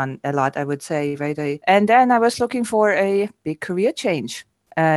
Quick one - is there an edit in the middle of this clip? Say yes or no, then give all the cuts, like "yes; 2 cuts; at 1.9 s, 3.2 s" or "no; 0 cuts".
yes; 1 cut; at 1.6 s